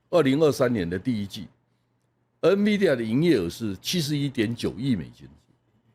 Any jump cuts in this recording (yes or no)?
no